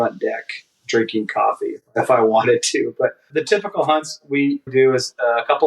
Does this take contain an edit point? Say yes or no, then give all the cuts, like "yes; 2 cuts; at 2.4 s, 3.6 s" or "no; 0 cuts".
yes; 3 cuts; at 1.9 s, 3.3 s, 4.7 s